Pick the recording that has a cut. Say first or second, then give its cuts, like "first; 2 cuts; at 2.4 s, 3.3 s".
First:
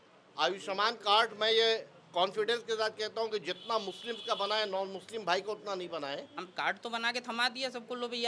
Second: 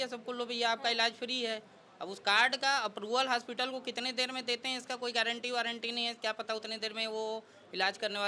first; 1 cut; at 6.4 s